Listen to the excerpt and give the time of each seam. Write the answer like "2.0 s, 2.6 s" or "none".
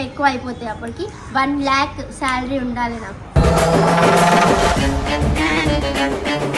none